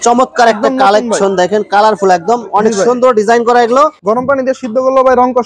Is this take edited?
yes; 1 cut; at 4.0 s

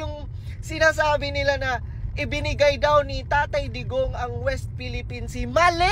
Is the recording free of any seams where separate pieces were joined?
yes; 0 cuts

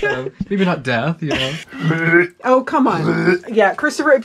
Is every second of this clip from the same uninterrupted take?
no; 1 cut; at 1.6 s

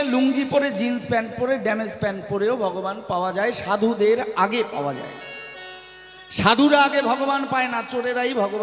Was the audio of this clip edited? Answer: no; 0 cuts

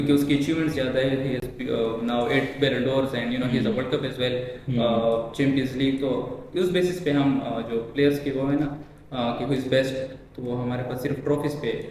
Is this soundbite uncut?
yes; 0 cuts

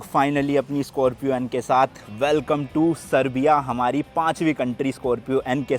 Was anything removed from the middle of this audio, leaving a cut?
no; 0 cuts

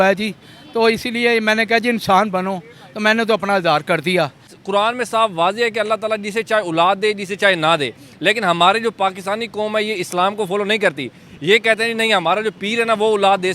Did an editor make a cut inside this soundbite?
yes; 1 cut; at 4.5 s

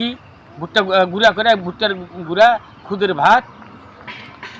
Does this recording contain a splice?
no; 0 cuts

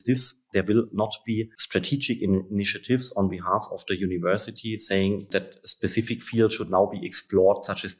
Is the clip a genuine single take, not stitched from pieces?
no; 1 cut; at 1.6 s

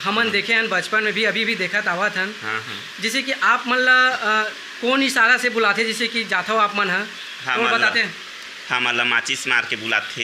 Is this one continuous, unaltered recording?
yes; 0 cuts

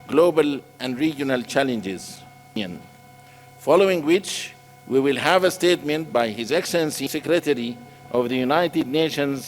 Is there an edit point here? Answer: yes; 2 cuts; at 2.6 s, 7.1 s

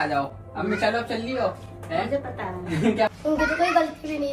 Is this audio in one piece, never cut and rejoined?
no; 1 cut; at 3.1 s

